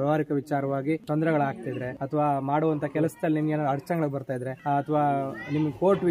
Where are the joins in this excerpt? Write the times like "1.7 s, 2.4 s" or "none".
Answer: 1.0 s, 1.9 s, 4.5 s